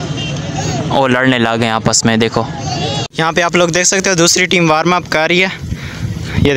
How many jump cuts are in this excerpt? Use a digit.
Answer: 1